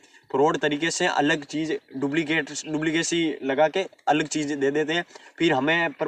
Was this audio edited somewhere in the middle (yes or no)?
no